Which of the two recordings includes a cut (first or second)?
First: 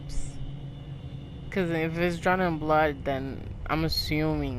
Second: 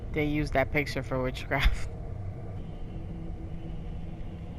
second